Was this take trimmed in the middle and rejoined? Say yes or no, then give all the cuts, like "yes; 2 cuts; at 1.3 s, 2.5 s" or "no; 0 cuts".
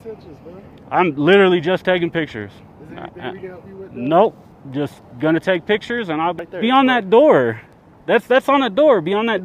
yes; 1 cut; at 6.4 s